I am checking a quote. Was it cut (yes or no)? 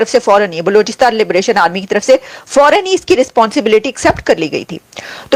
no